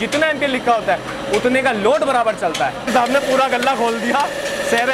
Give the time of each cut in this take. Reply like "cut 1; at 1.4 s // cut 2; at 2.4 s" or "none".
cut 1; at 2.9 s